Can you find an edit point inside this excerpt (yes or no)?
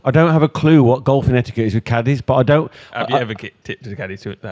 no